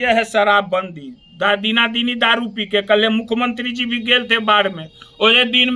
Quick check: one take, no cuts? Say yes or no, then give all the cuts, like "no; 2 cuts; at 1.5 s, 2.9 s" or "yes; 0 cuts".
yes; 0 cuts